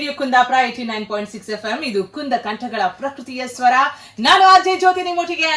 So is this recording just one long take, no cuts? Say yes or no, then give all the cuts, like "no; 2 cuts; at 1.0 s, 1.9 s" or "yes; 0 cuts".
yes; 0 cuts